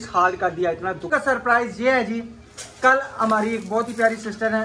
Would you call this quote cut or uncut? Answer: cut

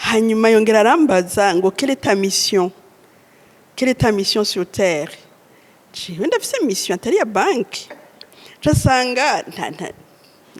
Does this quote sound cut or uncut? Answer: uncut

